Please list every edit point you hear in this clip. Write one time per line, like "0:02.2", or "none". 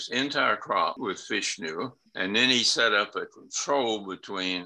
0:01.0
0:02.0